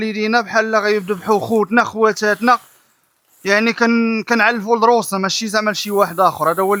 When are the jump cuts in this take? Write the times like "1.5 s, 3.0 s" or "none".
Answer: none